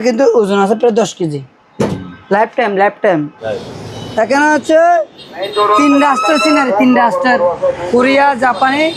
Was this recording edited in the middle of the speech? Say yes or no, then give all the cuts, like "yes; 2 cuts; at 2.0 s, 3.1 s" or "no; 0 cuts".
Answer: yes; 1 cut; at 3.4 s